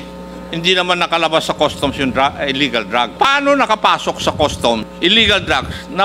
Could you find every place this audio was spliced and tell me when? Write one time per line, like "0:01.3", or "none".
0:03.1
0:04.9